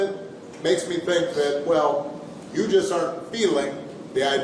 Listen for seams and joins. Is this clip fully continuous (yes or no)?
yes